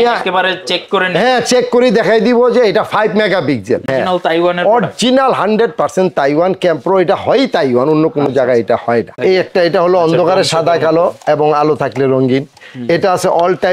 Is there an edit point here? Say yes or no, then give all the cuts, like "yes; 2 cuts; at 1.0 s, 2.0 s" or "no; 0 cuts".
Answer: yes; 2 cuts; at 3.9 s, 9.2 s